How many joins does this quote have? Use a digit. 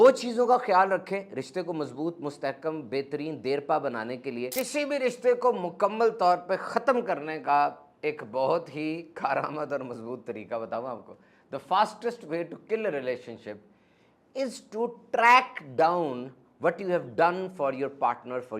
1